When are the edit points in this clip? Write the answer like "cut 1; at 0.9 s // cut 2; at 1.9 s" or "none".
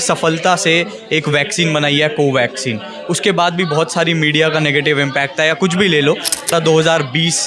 cut 1; at 6.5 s